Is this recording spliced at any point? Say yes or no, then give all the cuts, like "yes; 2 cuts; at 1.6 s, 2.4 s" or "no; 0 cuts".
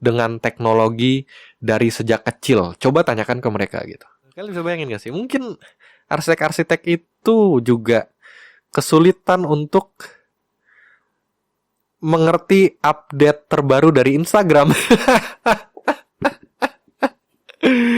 yes; 1 cut; at 4.4 s